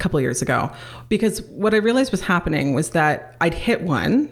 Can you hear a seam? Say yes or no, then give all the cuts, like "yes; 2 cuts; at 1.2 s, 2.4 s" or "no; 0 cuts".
no; 0 cuts